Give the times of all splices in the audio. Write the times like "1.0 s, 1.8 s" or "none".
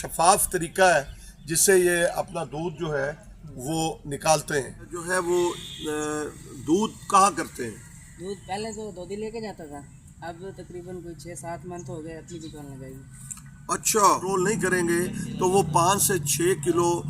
5.0 s, 14.3 s